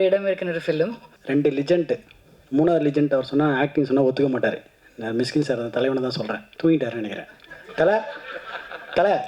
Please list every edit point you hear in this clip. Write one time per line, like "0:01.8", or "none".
0:01.1
0:06.4